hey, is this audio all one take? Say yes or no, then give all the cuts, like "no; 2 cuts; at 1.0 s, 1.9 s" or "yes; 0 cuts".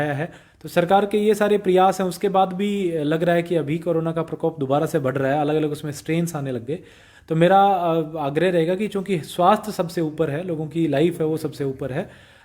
yes; 0 cuts